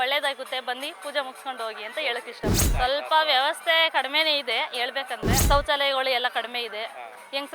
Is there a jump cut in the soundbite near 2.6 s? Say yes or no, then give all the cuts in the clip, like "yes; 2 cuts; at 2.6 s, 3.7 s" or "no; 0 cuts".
yes; 2 cuts; at 2.6 s, 5.4 s